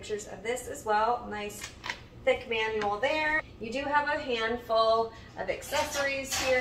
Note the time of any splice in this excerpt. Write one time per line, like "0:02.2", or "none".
0:03.4